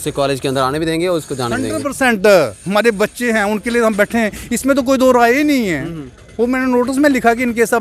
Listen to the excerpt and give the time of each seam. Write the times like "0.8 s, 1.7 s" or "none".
none